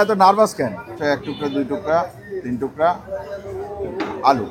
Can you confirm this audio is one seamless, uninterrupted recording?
no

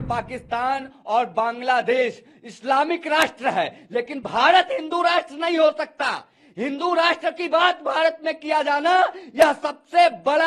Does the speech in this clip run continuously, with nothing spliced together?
yes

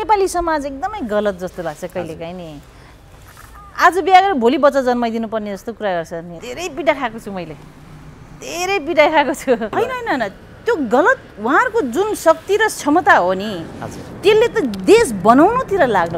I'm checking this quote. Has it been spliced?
yes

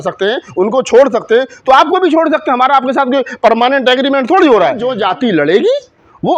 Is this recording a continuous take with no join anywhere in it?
no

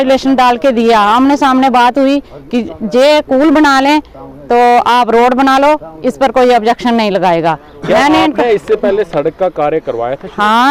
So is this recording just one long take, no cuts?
yes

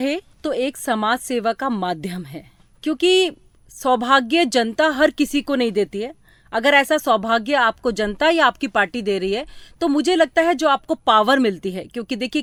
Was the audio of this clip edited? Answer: no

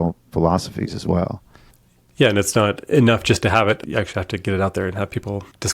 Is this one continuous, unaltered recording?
no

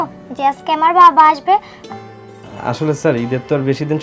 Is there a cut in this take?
yes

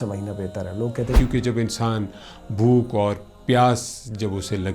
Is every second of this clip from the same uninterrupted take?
no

